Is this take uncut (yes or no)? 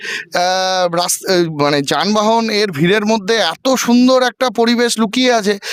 yes